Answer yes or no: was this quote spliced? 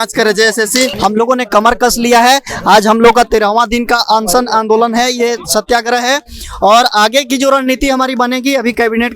yes